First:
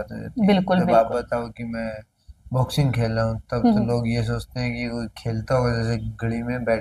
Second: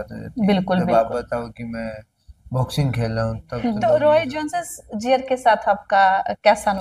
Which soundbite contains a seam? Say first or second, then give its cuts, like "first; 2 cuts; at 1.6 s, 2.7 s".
second; 1 cut; at 3.8 s